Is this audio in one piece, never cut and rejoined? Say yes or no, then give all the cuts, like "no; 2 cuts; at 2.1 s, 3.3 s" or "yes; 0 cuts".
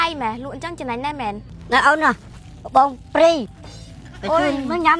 yes; 0 cuts